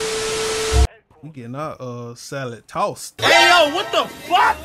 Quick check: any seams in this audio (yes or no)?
yes